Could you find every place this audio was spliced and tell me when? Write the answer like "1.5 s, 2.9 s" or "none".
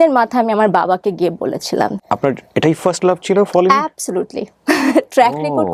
2.0 s